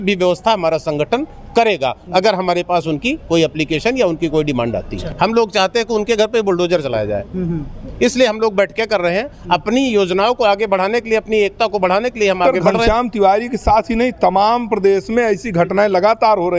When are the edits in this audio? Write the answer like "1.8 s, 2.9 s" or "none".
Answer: 5.0 s, 12.6 s